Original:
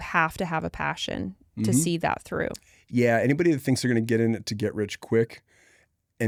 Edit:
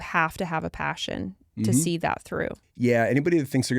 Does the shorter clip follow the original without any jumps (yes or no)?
no